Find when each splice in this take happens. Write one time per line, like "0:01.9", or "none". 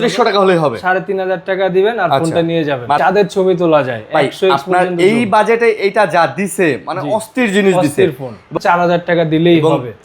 0:03.0
0:08.5